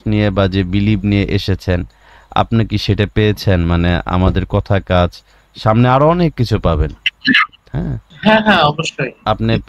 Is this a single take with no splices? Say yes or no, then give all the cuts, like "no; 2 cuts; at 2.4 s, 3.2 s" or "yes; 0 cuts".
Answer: no; 1 cut; at 8.1 s